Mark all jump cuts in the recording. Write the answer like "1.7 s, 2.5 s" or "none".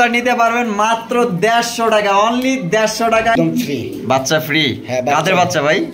3.3 s